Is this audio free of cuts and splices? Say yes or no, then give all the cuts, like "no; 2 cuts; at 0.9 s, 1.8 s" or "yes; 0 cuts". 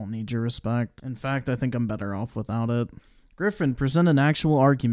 no; 2 cuts; at 1.0 s, 3.0 s